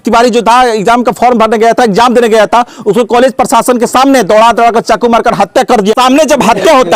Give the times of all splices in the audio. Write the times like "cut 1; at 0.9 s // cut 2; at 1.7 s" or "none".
cut 1; at 5.9 s